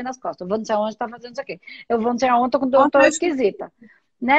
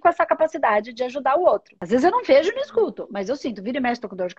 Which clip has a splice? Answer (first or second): second